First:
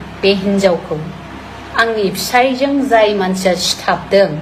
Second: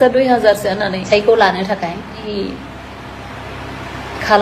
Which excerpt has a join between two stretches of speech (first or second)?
second